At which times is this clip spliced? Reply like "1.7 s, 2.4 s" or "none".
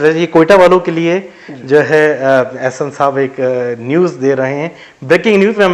none